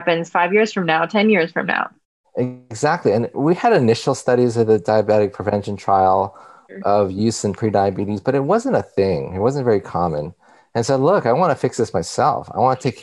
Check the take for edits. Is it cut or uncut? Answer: cut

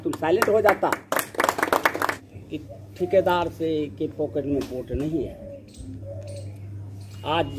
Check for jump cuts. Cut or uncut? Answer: cut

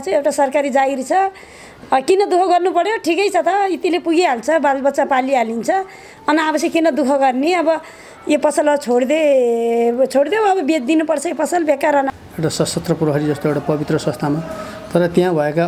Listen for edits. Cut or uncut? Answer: cut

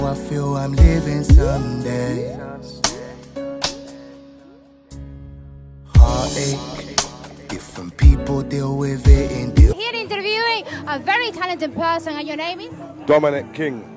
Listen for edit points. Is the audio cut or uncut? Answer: uncut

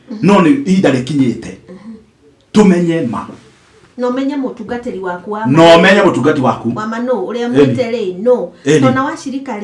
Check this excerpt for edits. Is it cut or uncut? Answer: uncut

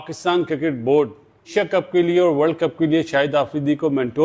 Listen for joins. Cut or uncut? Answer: cut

